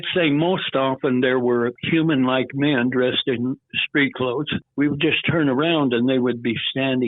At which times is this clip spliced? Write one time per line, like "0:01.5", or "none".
0:01.8
0:04.6